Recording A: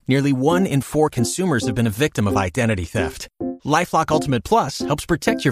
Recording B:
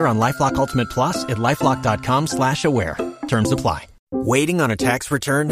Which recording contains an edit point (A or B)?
B